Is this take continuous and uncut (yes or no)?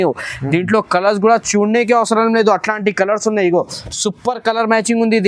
yes